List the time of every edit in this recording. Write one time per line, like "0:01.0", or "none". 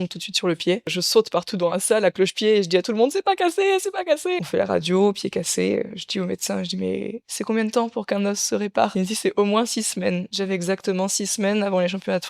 0:01.0
0:04.4
0:08.9
0:10.6